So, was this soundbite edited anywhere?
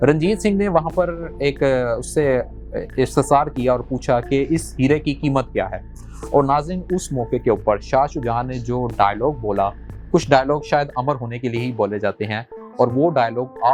no; 0 cuts

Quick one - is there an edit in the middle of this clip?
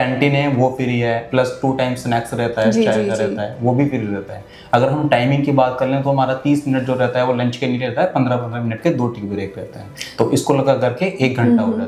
no; 0 cuts

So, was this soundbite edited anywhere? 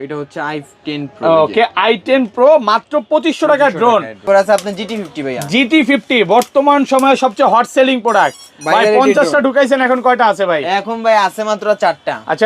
yes; 1 cut; at 4.2 s

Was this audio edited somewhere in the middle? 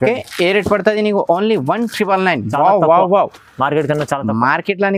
no; 0 cuts

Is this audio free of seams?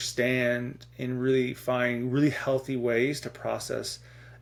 yes; 0 cuts

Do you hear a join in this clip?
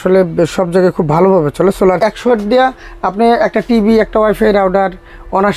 yes; 1 cut; at 2.1 s

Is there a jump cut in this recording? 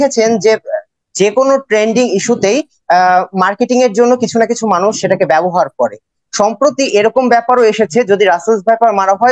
no; 0 cuts

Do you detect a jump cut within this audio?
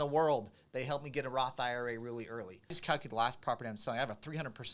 yes; 1 cut; at 2.8 s

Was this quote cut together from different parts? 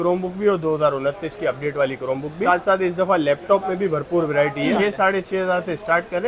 yes; 2 cuts; at 2.5 s, 4.8 s

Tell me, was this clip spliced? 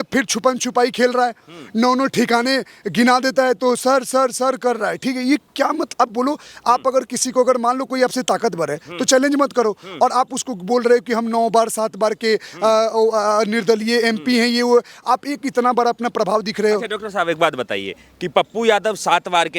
no; 0 cuts

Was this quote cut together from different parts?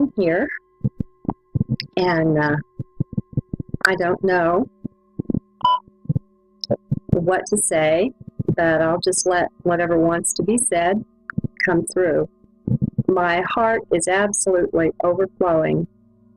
yes; 1 cut; at 10.3 s

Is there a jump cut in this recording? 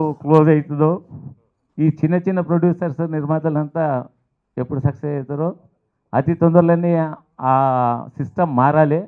no; 0 cuts

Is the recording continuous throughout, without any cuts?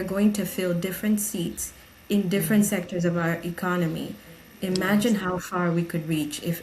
yes; 0 cuts

